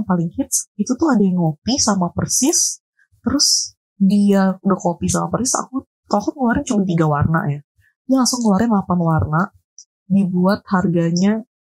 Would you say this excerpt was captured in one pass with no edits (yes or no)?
yes